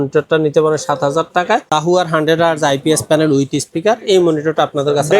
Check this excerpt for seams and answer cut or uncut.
cut